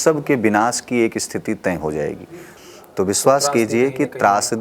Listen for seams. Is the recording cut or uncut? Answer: cut